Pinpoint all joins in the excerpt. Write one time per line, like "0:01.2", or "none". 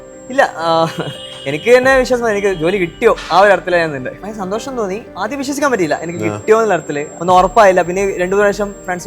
0:04.7
0:07.0

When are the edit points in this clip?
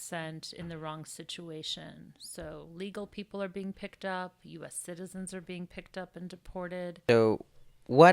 0:07.1

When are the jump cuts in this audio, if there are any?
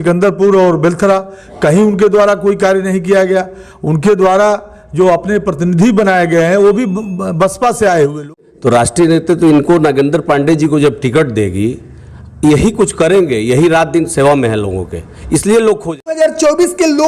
0:08.2
0:16.0

